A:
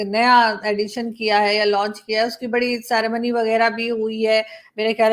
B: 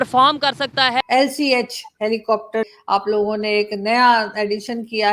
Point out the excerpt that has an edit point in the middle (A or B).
B